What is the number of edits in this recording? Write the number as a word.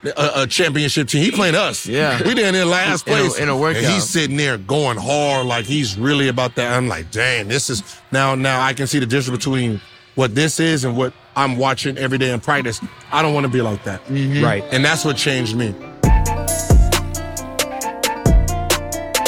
one